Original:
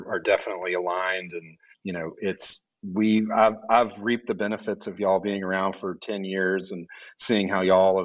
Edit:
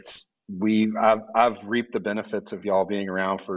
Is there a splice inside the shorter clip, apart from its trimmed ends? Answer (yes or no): no